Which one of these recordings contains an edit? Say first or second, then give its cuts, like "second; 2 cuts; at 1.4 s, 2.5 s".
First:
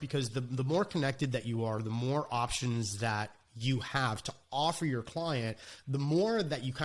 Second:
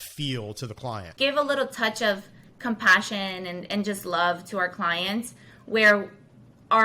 second; 1 cut; at 1.1 s